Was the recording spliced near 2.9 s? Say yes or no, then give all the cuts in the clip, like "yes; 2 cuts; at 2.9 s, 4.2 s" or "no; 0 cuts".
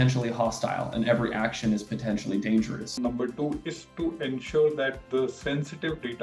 yes; 1 cut; at 2.9 s